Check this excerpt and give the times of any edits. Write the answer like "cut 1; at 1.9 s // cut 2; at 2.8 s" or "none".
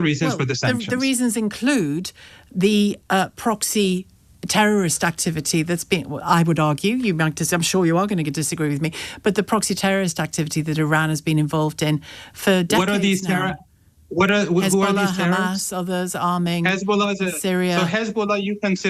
none